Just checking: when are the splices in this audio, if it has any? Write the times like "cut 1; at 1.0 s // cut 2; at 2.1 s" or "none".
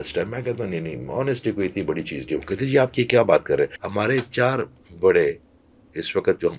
cut 1; at 3.8 s